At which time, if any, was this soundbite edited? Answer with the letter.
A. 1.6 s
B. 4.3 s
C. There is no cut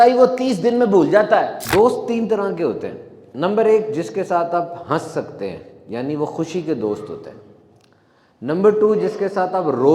A